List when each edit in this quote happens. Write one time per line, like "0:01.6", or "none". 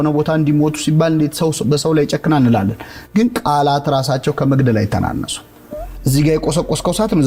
none